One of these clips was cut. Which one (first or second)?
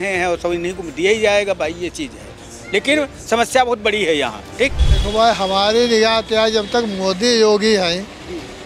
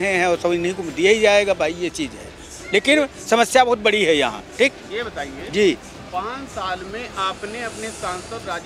first